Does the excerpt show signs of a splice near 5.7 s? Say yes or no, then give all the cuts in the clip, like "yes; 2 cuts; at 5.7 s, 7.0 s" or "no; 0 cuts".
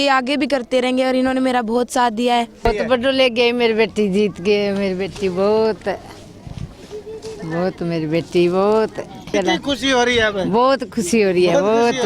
no; 2 cuts; at 2.7 s, 9.2 s